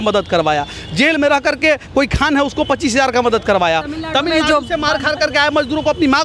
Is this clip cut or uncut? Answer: uncut